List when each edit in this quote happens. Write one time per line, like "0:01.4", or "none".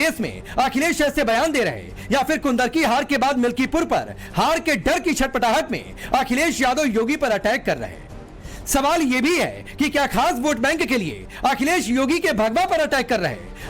0:07.6